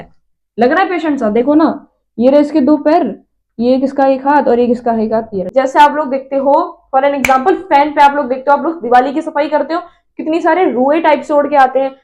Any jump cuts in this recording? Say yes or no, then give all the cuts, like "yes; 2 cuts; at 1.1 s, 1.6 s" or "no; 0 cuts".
yes; 1 cut; at 5.4 s